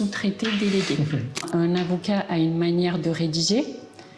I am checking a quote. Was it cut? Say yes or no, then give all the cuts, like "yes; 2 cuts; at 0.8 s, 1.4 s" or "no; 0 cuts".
yes; 1 cut; at 1.4 s